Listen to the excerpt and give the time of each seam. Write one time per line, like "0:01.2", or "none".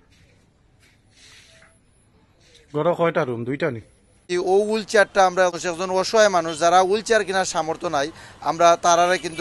0:04.1
0:05.6